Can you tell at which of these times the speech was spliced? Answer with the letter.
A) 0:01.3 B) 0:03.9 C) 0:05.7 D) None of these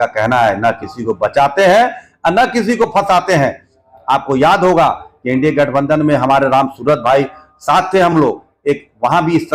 D